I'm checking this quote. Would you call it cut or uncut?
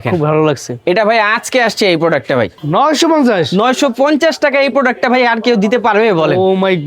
cut